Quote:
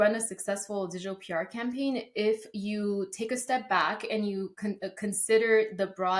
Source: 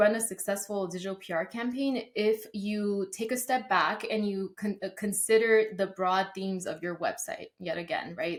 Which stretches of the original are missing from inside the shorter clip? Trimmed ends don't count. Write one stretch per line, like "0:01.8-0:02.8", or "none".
none